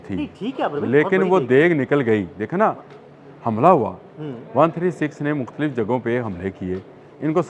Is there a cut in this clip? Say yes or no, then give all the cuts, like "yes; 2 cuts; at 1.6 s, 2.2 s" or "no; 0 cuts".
no; 0 cuts